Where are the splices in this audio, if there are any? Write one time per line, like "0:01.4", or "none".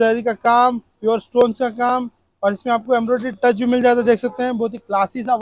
none

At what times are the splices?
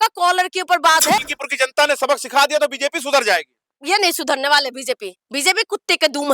0:01.2
0:03.7

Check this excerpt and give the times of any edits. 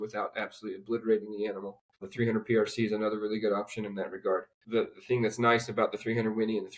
0:02.1
0:04.6

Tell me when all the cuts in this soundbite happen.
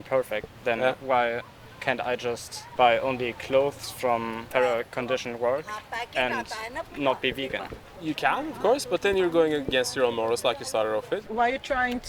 0:02.6
0:04.5
0:07.8
0:11.2

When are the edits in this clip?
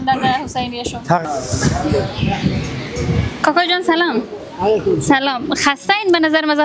0:01.2

